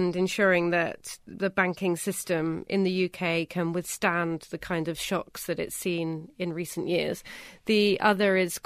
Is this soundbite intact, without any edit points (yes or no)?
yes